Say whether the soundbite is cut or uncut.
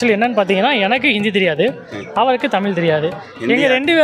uncut